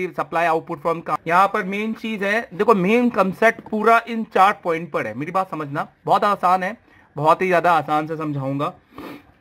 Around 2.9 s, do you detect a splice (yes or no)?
no